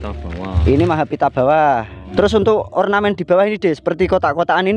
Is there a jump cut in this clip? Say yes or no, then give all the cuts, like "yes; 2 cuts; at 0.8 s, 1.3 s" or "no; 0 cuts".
yes; 1 cut; at 2.0 s